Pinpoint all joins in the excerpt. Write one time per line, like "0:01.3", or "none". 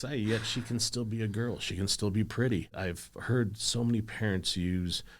0:02.7

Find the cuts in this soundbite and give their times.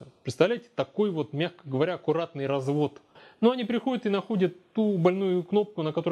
0:03.2

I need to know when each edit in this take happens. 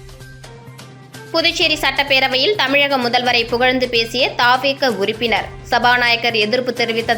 0:01.0

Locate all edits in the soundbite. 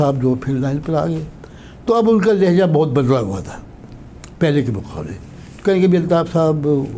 none

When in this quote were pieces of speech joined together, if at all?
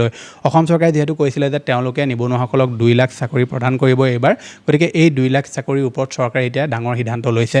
none

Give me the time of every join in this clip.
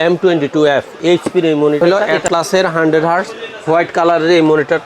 0:01.8

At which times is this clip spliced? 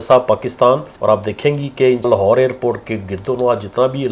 0:00.9
0:02.1

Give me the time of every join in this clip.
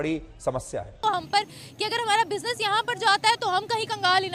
0:01.0

